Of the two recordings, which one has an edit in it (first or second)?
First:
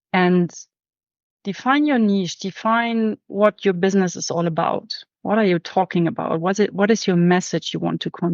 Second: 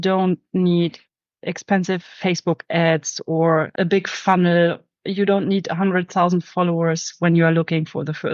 second